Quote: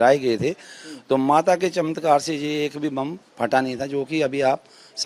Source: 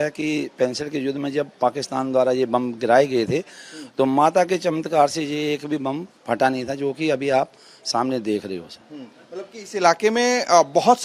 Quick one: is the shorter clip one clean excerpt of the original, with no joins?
yes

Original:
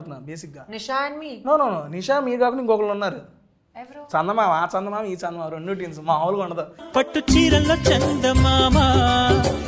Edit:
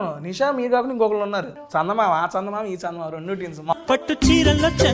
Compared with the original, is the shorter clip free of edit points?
no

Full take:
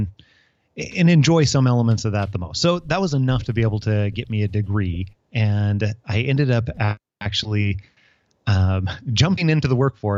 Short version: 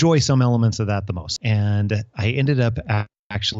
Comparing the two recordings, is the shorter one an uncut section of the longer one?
no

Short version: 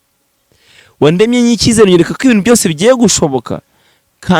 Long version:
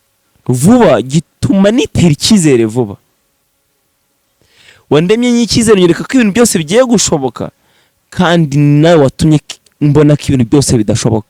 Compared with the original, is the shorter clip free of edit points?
yes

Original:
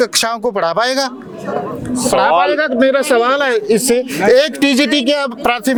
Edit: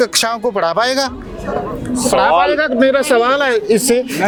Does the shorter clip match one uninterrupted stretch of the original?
yes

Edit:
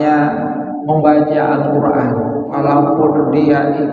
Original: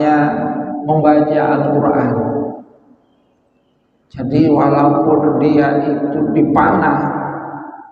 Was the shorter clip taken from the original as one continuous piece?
no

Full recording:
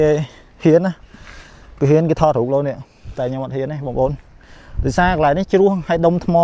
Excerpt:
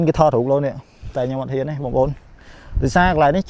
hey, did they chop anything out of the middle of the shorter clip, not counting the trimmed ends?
no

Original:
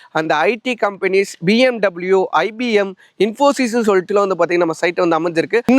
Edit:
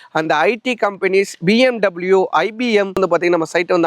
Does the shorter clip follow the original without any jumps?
no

